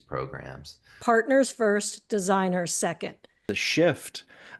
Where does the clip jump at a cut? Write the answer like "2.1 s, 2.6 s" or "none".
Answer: 0.9 s, 3.6 s